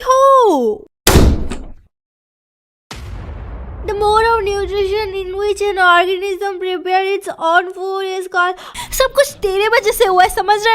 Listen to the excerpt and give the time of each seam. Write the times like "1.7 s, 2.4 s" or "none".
0.8 s, 8.7 s